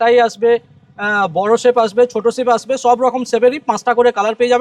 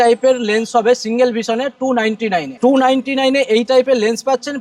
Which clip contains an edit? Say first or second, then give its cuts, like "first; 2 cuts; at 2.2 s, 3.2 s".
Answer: second; 1 cut; at 2.5 s